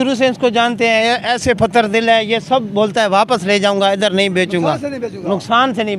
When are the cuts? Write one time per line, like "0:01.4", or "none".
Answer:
none